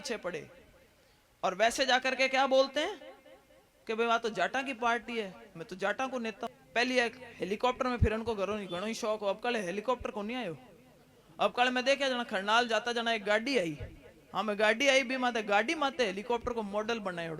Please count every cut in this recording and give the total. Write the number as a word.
one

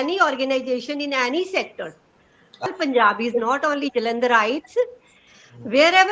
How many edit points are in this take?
one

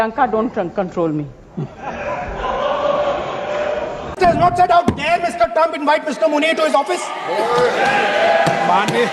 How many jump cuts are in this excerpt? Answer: zero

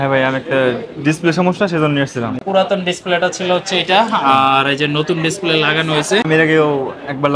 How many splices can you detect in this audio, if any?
two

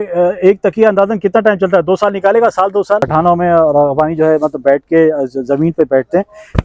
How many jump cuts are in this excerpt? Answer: one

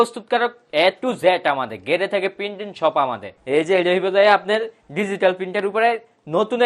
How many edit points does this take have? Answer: one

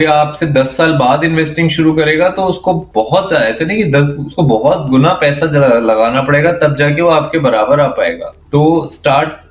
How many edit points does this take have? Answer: zero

